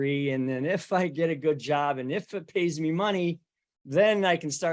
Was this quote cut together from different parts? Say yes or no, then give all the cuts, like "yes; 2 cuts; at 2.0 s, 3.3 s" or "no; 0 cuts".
no; 0 cuts